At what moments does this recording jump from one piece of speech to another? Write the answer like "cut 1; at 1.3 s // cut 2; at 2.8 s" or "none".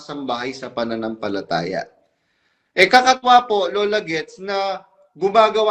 none